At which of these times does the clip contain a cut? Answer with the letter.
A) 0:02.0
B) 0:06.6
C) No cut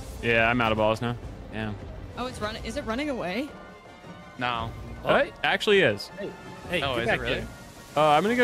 A